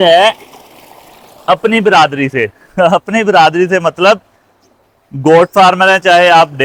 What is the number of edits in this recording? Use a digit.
0